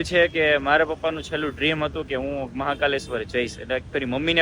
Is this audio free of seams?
yes; 0 cuts

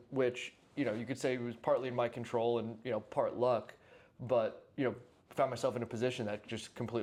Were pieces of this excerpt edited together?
no; 0 cuts

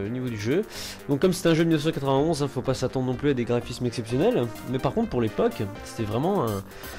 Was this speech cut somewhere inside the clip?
no; 0 cuts

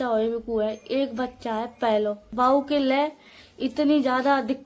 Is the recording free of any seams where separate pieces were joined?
yes; 0 cuts

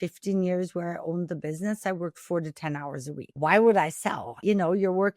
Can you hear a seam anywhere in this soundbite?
yes; 2 cuts; at 3.2 s, 4.3 s

